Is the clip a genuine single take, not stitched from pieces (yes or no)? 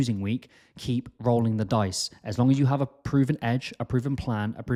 yes